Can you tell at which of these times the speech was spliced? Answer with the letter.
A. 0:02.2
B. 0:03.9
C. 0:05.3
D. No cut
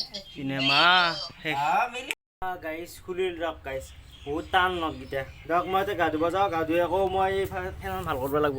A